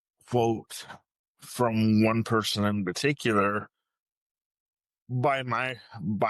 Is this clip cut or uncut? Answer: uncut